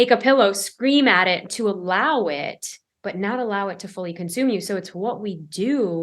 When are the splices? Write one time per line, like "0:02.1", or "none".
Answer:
0:01.4